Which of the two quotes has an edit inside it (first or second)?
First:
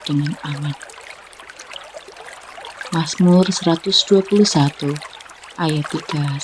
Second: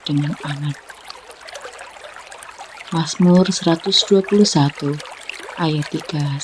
first